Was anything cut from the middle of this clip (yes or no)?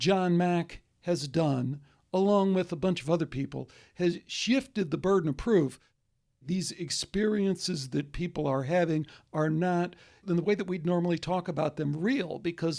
yes